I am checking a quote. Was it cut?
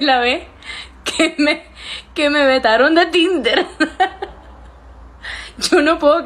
no; 0 cuts

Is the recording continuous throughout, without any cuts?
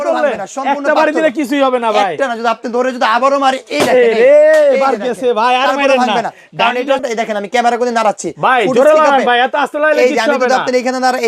no; 1 cut; at 7.0 s

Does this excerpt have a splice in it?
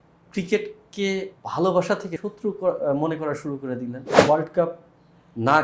yes; 2 cuts; at 2.2 s, 4.1 s

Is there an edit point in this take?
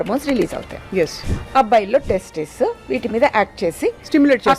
yes; 1 cut; at 1.2 s

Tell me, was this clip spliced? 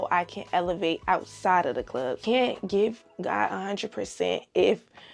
yes; 1 cut; at 2.2 s

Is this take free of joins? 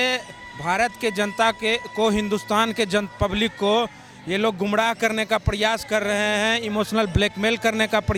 yes; 0 cuts

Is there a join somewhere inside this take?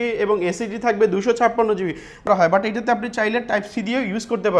yes; 1 cut; at 2.3 s

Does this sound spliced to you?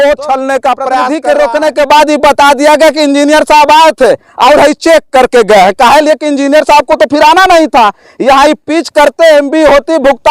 yes; 1 cut; at 1.1 s

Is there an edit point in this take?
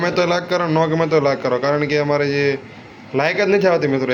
no; 0 cuts

